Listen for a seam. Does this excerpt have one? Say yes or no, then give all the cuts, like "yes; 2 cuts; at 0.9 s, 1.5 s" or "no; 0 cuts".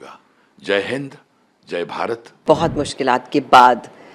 yes; 1 cut; at 2.4 s